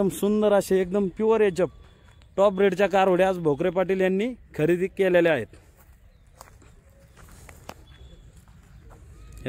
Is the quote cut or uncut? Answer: cut